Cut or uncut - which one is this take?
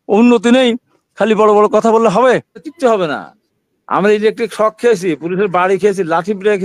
cut